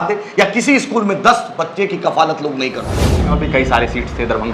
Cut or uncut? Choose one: cut